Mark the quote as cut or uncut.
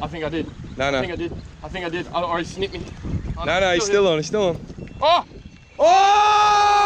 uncut